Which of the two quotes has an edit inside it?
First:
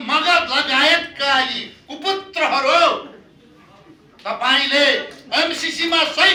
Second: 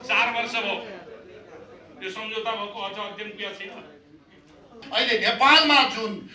second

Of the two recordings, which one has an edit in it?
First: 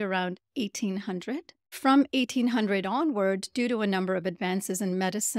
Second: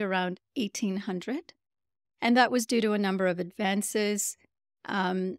first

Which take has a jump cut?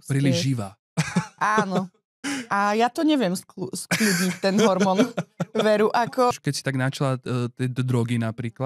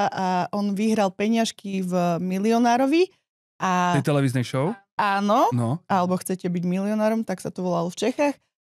first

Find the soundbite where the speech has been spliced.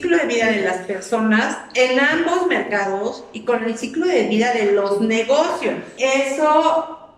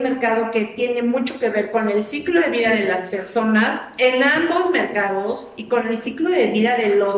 first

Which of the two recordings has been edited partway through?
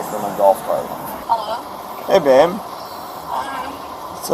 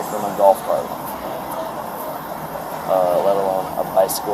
first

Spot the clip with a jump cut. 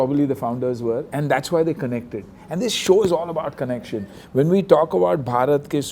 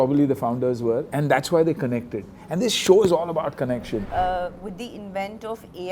second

